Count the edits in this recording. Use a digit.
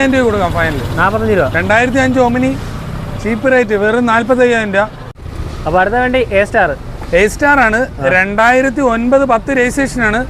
0